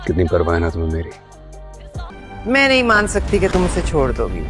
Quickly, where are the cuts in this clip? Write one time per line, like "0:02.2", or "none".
0:02.0